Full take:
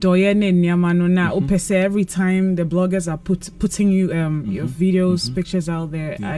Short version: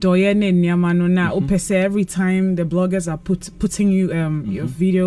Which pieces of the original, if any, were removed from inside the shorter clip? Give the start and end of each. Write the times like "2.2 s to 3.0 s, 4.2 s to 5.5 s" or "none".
none